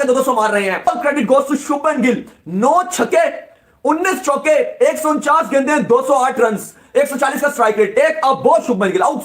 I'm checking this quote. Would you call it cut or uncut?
uncut